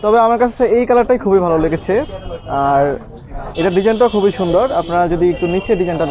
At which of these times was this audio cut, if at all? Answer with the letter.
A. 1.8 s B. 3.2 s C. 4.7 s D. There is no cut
D